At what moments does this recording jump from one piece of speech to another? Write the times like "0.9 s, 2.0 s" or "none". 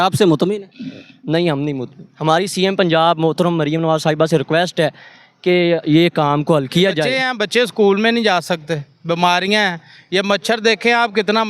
7.2 s